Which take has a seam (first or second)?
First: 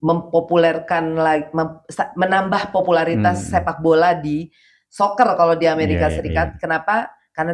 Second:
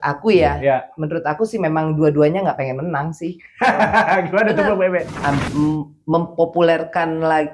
second